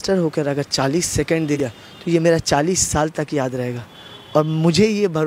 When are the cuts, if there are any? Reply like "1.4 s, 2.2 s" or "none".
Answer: 1.6 s